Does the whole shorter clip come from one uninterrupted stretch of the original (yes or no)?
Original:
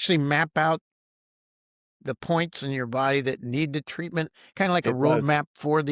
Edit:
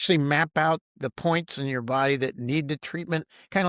no